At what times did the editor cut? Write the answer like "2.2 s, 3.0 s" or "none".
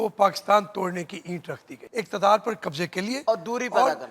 1.8 s